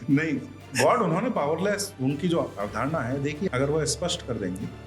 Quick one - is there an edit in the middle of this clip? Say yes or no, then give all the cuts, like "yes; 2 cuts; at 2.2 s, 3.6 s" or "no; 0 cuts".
yes; 1 cut; at 3.5 s